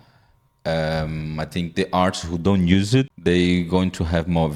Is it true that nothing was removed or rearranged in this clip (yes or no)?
no